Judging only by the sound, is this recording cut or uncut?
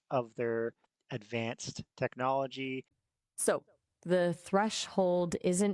cut